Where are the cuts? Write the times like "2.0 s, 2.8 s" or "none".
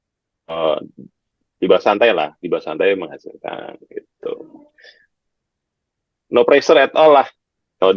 none